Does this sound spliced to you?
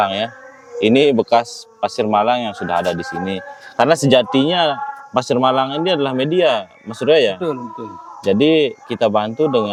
no; 0 cuts

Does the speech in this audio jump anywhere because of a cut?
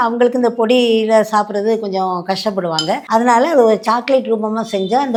no; 0 cuts

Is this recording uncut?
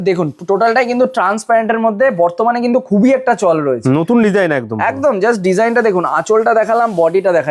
yes; 0 cuts

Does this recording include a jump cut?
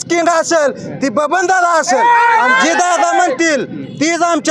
no; 0 cuts

